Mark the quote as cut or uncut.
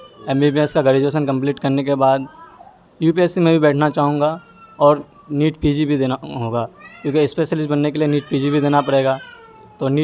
uncut